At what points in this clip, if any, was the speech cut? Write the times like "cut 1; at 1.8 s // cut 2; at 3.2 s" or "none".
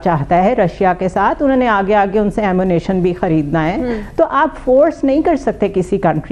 none